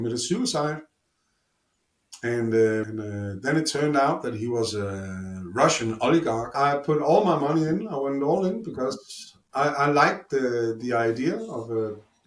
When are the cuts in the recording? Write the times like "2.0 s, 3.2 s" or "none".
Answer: 2.9 s, 6.5 s